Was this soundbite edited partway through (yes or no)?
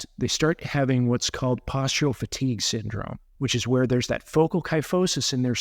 yes